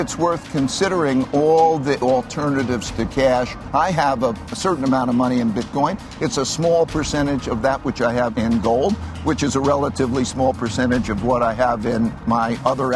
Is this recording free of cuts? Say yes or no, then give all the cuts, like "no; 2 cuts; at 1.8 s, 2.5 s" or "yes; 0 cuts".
no; 4 cuts; at 2.0 s, 3.6 s, 4.6 s, 8.3 s